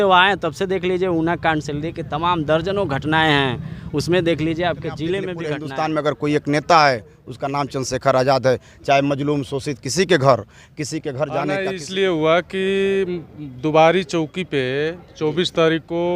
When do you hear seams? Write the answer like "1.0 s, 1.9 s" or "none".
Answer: 5.5 s, 11.6 s

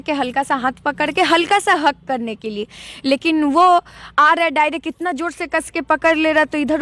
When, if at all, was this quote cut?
none

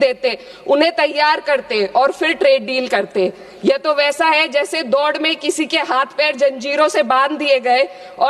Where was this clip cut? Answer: none

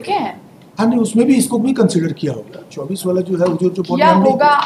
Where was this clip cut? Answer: none

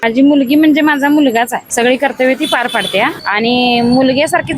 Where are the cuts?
1.6 s, 3.2 s

